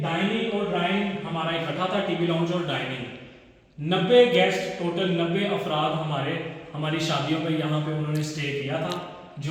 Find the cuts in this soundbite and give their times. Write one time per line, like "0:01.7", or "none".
none

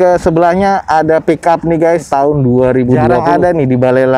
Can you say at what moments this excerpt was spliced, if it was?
0:02.1
0:03.2

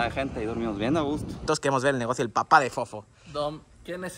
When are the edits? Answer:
0:01.4

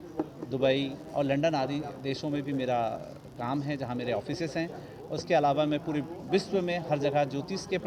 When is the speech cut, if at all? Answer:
none

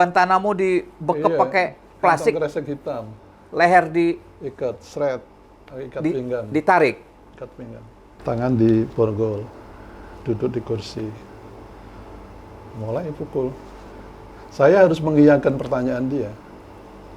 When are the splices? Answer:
0:08.2

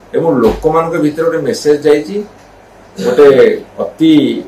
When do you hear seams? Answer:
none

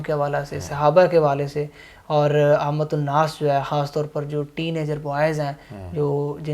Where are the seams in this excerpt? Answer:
none

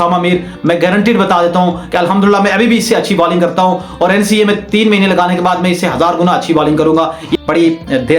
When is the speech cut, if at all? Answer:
0:07.3

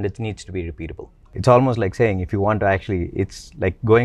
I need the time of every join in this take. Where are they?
0:01.3

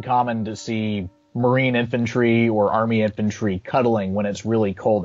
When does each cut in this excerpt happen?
0:01.2

